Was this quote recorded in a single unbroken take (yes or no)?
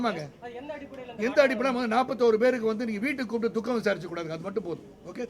yes